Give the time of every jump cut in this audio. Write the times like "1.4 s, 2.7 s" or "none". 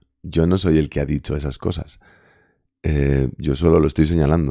none